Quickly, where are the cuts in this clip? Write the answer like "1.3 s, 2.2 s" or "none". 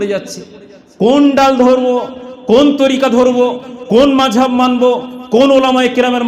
none